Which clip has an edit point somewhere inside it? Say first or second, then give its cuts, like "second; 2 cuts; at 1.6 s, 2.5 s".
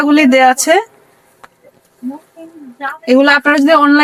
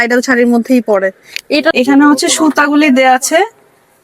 second; 1 cut; at 1.7 s